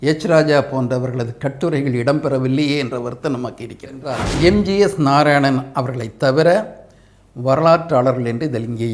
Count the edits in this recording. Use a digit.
1